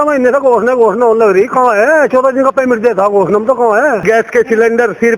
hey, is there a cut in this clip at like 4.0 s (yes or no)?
yes